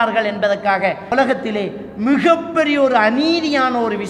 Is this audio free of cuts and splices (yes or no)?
no